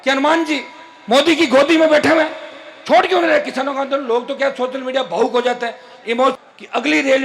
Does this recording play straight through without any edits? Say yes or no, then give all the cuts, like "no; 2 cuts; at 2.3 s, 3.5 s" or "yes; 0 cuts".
no; 1 cut; at 6.3 s